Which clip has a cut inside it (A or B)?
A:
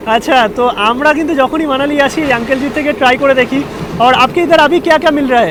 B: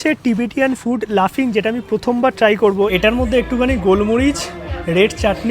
B